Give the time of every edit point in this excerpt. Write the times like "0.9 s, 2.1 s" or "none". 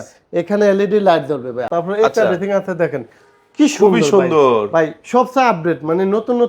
1.6 s